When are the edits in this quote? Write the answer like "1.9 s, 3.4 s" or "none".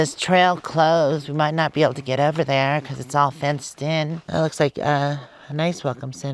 none